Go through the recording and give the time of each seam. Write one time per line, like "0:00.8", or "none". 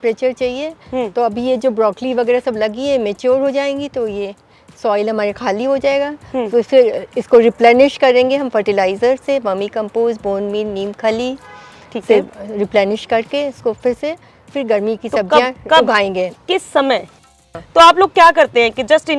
0:17.2